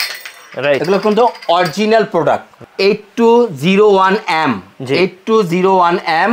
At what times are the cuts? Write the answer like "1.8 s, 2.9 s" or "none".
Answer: 2.6 s